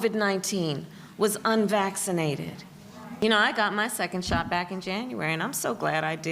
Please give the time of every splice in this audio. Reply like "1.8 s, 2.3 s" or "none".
3.1 s